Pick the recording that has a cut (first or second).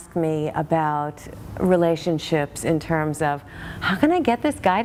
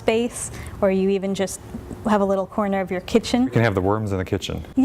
second